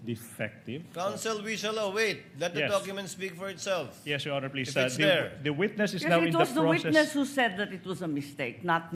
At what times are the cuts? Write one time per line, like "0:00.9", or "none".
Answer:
none